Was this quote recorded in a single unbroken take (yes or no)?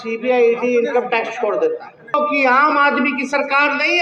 no